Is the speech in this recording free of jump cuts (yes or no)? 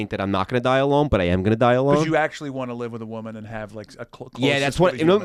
yes